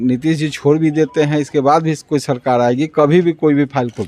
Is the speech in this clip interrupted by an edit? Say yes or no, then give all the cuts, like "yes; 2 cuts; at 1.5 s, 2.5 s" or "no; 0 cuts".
no; 0 cuts